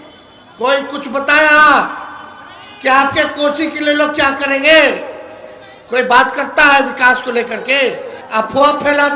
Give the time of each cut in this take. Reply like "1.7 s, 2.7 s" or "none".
8.2 s